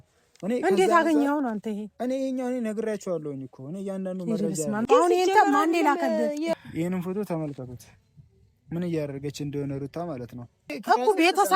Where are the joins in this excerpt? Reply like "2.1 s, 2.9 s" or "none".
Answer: 4.8 s, 6.5 s, 10.8 s